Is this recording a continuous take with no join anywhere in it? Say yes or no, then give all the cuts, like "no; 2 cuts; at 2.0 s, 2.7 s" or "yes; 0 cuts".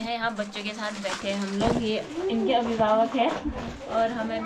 yes; 0 cuts